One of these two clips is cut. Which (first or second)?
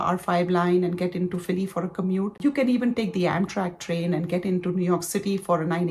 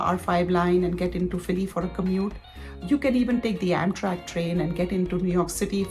first